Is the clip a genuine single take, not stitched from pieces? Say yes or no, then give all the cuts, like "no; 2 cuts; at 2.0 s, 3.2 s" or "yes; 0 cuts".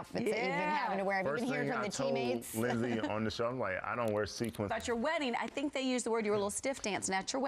no; 1 cut; at 3.0 s